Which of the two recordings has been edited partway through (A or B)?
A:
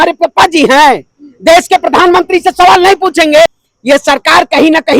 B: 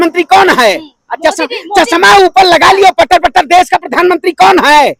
A